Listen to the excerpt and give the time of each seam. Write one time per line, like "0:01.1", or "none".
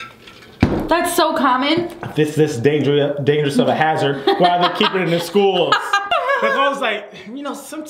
0:06.0